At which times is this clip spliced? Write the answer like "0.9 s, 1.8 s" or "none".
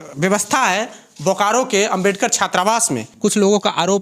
3.0 s